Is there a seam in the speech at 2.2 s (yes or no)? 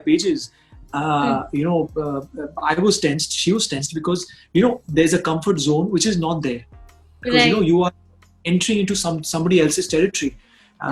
no